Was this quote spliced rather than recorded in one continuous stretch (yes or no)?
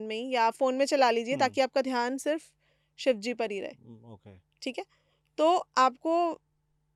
no